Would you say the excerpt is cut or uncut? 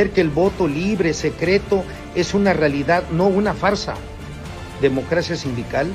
cut